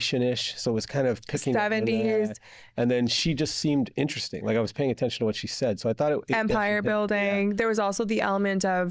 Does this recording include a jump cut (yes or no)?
no